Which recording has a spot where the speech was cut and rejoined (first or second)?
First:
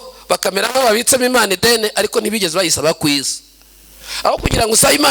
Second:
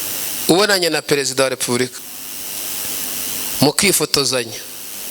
second